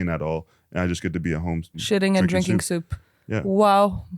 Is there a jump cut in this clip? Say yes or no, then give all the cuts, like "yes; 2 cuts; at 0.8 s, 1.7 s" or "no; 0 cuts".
yes; 1 cut; at 1.8 s